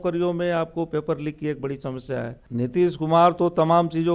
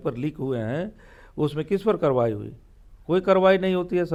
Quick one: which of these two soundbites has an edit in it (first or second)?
first